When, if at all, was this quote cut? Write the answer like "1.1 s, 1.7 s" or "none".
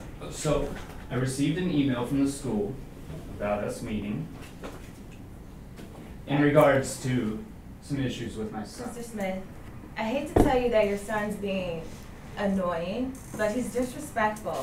8.8 s